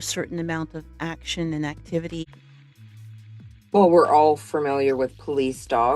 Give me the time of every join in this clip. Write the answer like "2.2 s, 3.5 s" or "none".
2.2 s